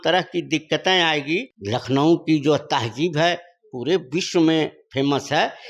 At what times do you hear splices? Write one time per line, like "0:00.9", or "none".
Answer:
0:01.5

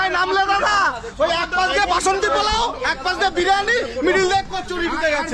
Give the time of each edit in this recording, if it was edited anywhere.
none

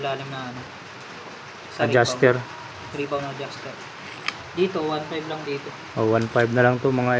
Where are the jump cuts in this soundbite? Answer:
none

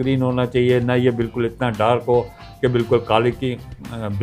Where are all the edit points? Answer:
none

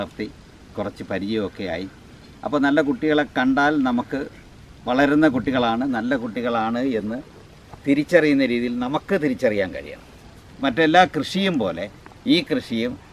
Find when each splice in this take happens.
0:10.5

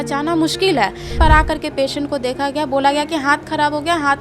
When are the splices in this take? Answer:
0:01.1

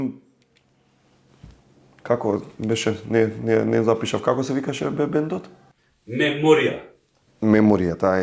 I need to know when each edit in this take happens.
0:07.2

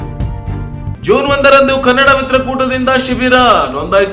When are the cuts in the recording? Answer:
0:00.9

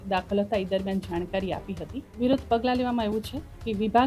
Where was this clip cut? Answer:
0:02.1

